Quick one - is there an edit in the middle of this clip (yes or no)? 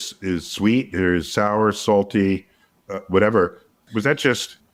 no